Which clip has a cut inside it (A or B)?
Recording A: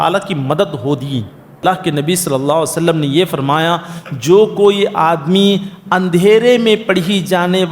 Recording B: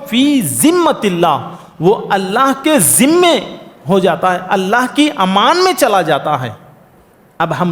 A